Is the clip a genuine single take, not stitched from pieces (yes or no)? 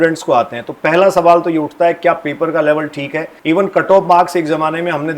no